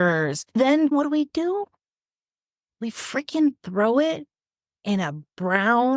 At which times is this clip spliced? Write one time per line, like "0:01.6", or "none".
0:00.9